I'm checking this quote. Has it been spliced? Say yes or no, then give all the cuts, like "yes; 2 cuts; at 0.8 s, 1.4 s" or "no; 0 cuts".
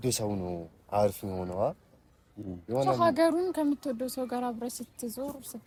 no; 0 cuts